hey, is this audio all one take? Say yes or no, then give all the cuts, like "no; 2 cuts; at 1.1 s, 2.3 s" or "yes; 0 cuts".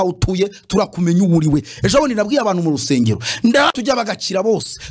no; 1 cut; at 3.7 s